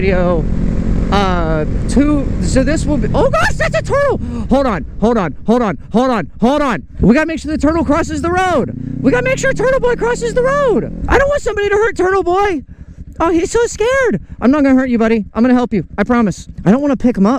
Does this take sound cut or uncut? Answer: cut